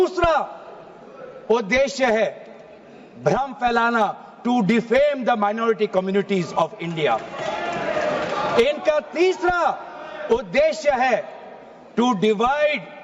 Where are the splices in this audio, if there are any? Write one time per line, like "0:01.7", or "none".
none